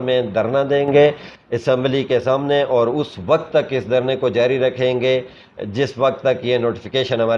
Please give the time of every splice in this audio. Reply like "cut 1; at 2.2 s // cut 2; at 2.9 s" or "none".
none